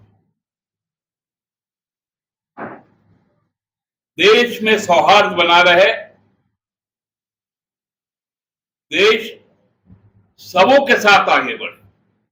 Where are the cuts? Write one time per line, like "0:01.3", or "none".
none

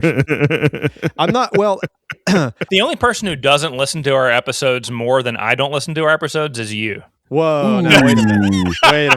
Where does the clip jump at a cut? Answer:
0:02.6
0:07.1

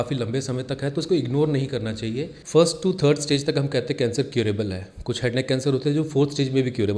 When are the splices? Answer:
0:02.3

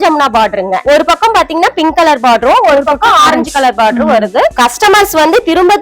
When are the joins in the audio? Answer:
0:00.8
0:04.5

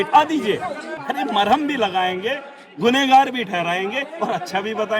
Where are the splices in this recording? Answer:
0:00.9

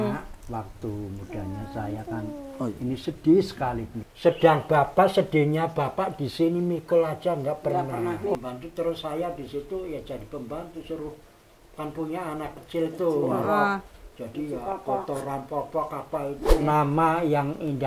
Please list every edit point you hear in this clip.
0:04.0
0:08.3
0:16.5

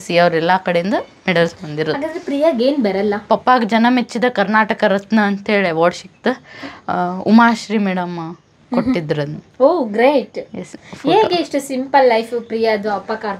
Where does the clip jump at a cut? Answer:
0:03.3
0:10.8

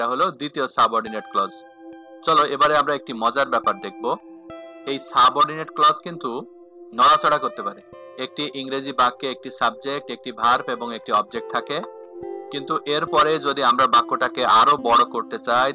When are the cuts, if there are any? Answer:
0:01.7
0:08.1
0:11.9

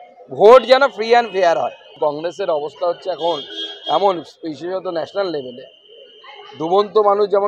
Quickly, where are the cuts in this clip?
0:01.8

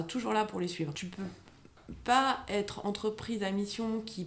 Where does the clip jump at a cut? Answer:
0:01.1

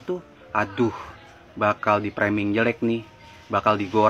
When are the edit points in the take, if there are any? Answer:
none

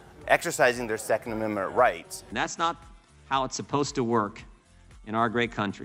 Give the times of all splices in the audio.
none

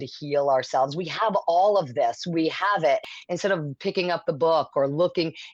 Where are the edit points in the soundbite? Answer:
0:03.0

